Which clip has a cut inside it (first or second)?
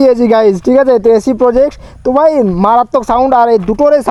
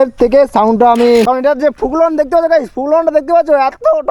second